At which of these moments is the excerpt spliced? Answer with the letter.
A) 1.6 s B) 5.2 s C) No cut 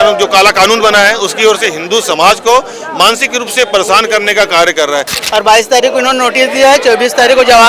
B